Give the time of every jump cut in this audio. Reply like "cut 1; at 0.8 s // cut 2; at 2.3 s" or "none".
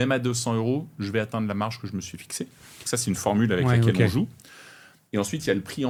none